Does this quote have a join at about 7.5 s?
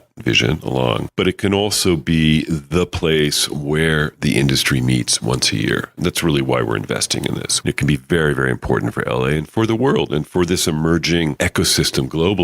yes; 3 cuts; at 1.1 s, 7.5 s, 11.4 s

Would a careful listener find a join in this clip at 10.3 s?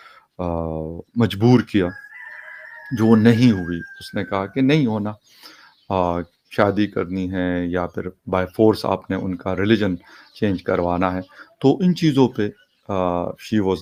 no; 0 cuts

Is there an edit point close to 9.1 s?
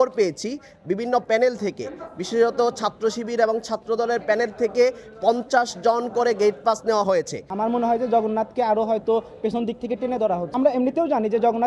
no; 2 cuts; at 7.4 s, 10.5 s

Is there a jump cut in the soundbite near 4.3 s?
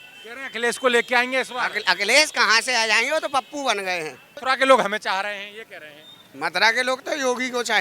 yes; 1 cut; at 4.3 s

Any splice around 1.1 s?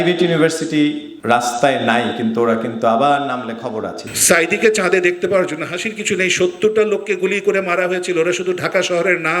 yes; 2 cuts; at 1.1 s, 4.1 s

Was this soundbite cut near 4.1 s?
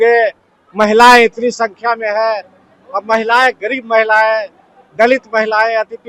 no; 0 cuts

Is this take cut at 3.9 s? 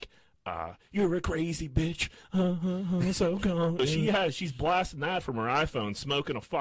yes; 1 cut; at 3.9 s

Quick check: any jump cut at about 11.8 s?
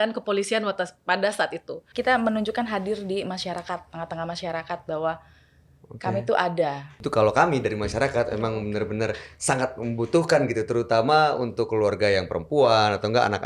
no; 2 cuts; at 1.9 s, 6.9 s

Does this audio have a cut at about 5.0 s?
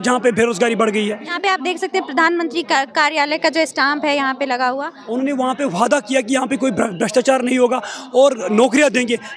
yes; 2 cuts; at 1.3 s, 5.0 s

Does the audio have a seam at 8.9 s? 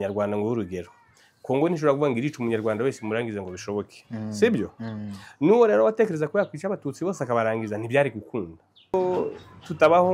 yes; 1 cut; at 8.9 s

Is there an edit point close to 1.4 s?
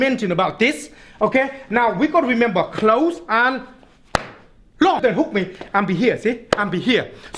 no; 1 cut; at 5.0 s

